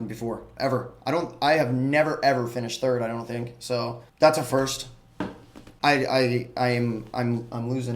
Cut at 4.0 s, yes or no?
yes